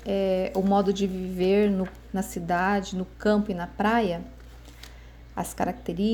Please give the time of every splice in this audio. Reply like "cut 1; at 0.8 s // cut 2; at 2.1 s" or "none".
none